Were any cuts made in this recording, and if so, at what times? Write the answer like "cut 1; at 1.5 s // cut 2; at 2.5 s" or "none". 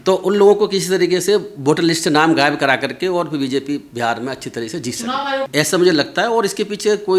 cut 1; at 5.5 s